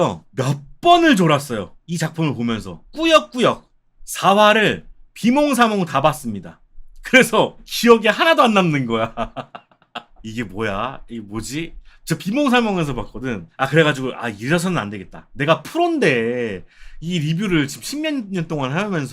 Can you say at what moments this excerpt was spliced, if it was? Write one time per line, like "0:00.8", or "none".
0:01.8
0:02.8